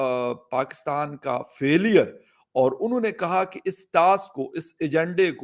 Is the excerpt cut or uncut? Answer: uncut